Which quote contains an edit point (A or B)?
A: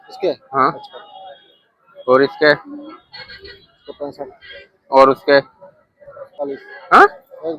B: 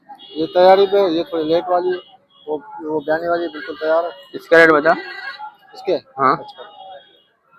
A